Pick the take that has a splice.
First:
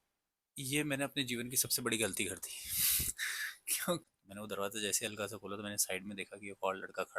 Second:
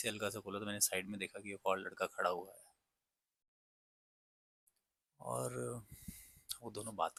first; 1 cut; at 4.0 s

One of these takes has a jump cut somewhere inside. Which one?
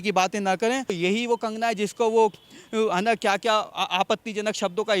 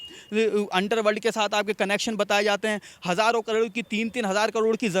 first; 1 cut; at 1.0 s

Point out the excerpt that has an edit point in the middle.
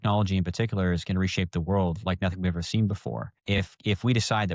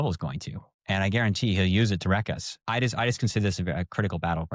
second; 1 cut; at 2.6 s

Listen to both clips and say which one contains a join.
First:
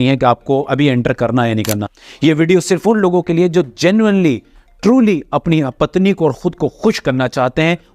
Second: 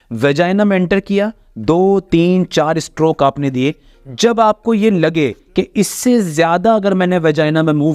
first; 1 cut; at 2.0 s

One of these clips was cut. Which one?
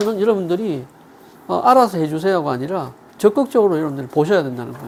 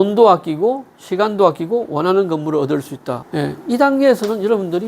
second; 1 cut; at 3.2 s

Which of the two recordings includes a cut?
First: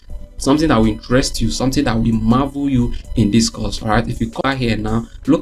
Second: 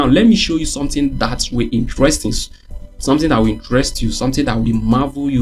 first; 1 cut; at 4.4 s

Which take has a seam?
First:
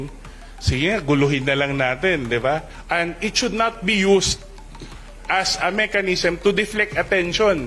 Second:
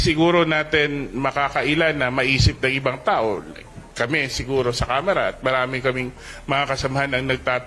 first; 1 cut; at 2.8 s

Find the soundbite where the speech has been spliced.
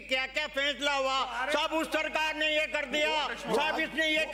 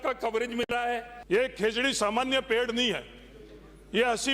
second; 1 cut; at 1.1 s

